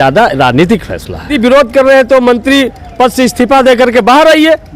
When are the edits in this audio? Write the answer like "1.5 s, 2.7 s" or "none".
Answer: 1.3 s

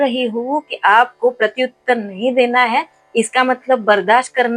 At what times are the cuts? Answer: none

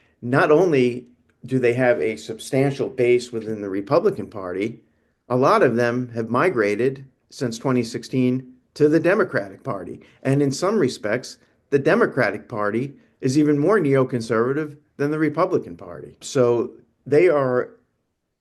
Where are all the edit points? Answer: 16.2 s

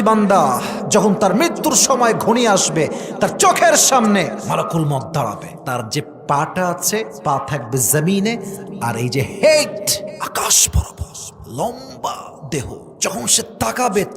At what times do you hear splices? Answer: 4.4 s, 5.5 s, 7.1 s, 10.2 s, 12.9 s

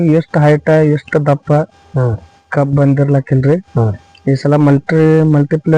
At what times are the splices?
none

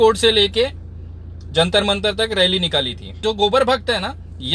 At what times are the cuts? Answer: 3.2 s

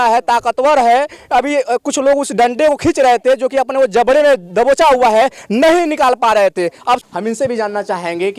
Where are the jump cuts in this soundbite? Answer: 7.0 s

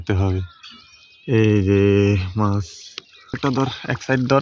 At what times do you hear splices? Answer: 3.4 s

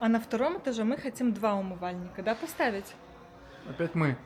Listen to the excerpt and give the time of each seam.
none

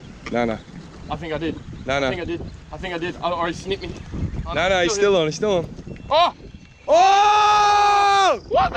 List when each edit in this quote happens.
none

